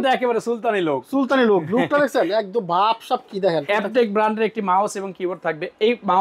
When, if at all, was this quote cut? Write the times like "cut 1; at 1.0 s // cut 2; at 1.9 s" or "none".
cut 1; at 3.7 s